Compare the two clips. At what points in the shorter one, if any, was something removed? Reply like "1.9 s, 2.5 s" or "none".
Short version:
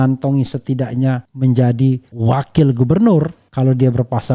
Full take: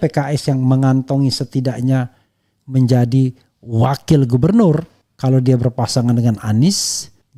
1.3 s, 2.1 s, 3.4 s